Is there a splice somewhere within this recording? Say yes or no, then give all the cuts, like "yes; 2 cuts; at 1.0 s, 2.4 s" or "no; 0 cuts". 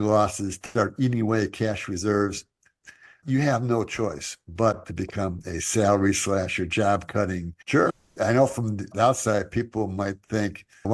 yes; 1 cut; at 8.0 s